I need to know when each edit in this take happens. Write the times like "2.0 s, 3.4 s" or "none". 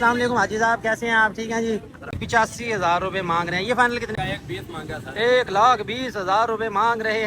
2.2 s, 4.1 s